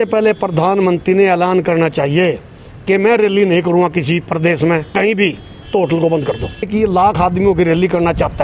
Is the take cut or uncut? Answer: cut